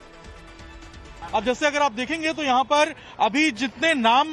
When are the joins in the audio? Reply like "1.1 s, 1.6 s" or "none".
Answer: 1.2 s